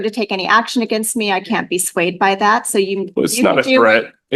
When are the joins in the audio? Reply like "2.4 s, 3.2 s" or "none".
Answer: none